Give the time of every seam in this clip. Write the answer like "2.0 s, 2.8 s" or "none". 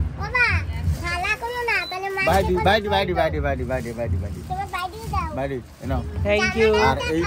none